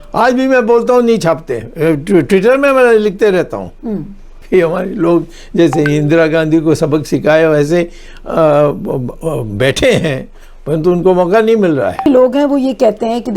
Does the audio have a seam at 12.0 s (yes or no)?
yes